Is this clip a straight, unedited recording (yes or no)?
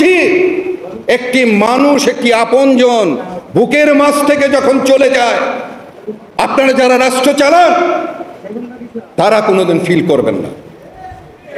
yes